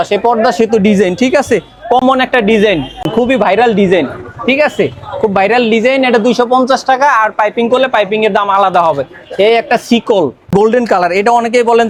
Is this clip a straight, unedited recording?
yes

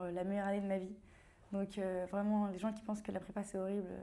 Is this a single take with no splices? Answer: yes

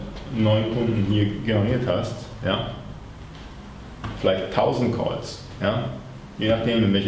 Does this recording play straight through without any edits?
yes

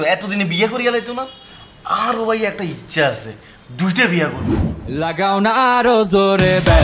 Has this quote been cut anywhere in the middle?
yes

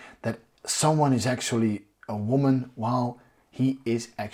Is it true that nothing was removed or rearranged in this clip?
yes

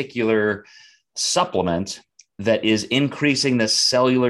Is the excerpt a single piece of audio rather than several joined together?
yes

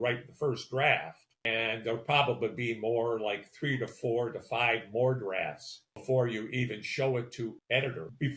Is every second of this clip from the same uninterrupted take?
no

